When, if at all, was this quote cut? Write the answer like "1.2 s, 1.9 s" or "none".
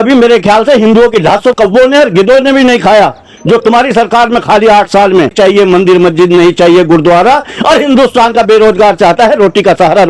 1.5 s, 5.3 s